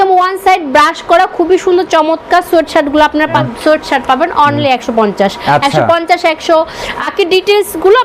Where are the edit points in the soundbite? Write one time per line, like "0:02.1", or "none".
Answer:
0:03.4
0:07.1